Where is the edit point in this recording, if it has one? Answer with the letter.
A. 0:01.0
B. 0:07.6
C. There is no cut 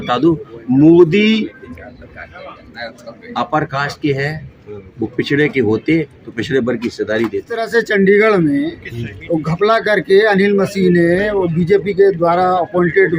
B